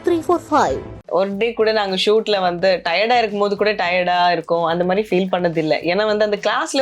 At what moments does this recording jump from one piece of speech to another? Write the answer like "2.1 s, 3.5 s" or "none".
1.1 s